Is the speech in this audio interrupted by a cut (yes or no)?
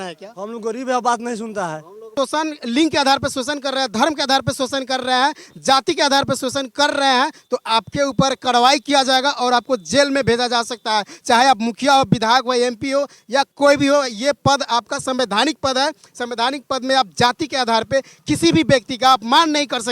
yes